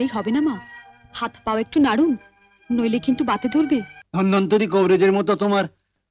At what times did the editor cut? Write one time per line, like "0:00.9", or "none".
0:04.0